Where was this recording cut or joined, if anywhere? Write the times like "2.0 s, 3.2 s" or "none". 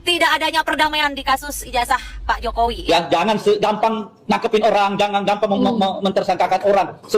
2.8 s